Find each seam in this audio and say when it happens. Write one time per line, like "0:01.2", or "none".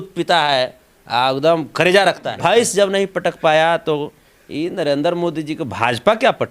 0:02.3